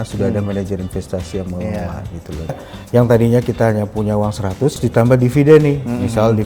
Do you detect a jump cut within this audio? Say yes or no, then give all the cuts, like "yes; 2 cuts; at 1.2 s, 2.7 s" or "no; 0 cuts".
yes; 2 cuts; at 2.6 s, 4.8 s